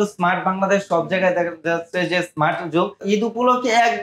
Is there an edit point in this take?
yes; 1 cut; at 3.0 s

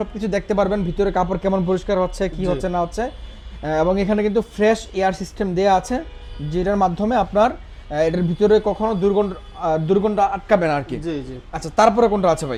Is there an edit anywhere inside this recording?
no; 0 cuts

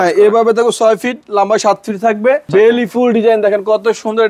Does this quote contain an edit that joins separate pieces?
yes; 1 cut; at 2.5 s

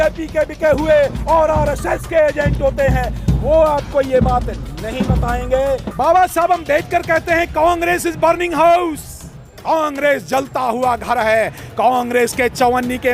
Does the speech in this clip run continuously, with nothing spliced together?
no; 1 cut; at 5.9 s

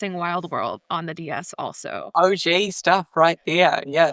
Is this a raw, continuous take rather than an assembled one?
no; 1 cut; at 1.9 s

